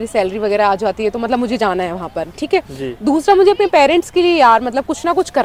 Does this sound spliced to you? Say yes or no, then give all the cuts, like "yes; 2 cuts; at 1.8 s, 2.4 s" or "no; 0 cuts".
no; 0 cuts